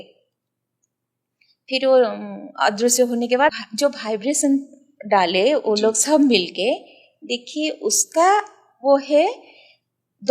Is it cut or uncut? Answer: cut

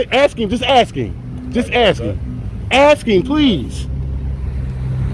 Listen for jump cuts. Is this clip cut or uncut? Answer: uncut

